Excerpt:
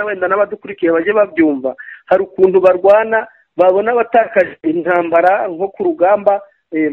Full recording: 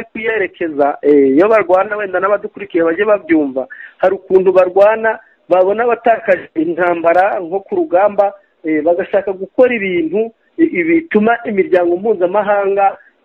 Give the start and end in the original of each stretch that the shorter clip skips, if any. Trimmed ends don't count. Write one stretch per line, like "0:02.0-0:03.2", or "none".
none